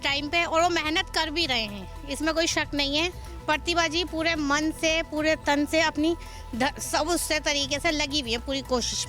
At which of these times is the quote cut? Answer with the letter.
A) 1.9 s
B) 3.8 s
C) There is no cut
C